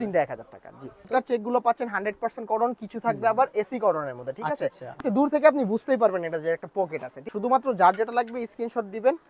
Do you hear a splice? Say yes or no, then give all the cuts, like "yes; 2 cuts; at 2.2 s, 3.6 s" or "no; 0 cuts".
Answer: yes; 3 cuts; at 1.1 s, 5.0 s, 7.2 s